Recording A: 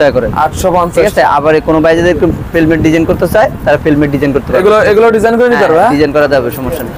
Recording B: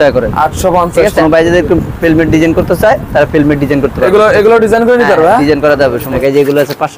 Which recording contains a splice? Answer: B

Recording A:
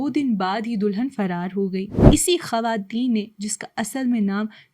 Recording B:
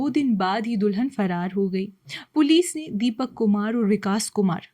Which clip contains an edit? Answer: A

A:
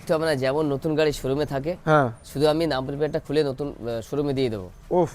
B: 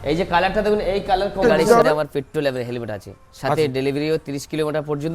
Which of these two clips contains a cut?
B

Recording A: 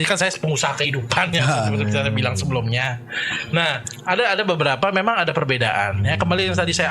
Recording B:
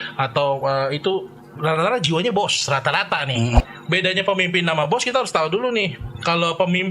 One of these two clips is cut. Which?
B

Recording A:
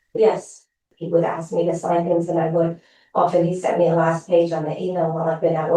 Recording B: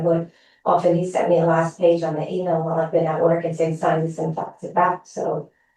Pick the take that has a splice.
A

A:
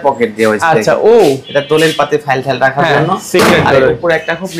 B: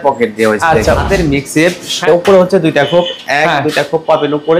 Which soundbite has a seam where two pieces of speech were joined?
B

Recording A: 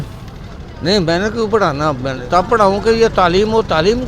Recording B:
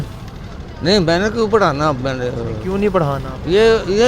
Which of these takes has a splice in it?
A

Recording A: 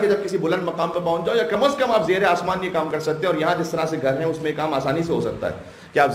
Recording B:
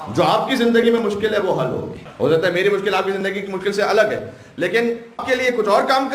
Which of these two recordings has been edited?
B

